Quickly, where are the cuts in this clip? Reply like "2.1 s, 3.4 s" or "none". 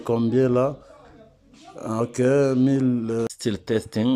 3.3 s